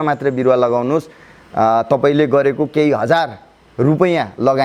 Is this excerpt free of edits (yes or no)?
yes